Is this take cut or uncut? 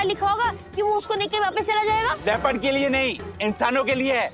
cut